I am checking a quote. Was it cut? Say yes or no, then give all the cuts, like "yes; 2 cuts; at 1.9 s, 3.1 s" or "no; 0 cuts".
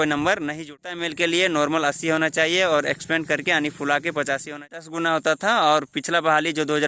yes; 2 cuts; at 1.0 s, 4.8 s